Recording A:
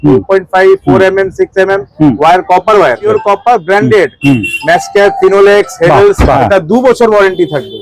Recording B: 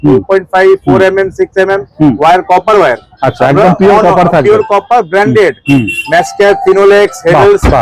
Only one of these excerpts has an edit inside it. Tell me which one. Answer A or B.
A